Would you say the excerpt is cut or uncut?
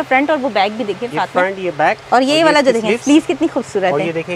uncut